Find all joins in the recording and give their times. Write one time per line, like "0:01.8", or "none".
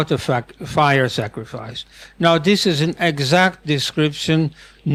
none